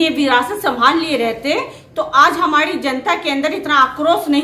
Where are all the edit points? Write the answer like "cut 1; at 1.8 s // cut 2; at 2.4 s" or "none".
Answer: none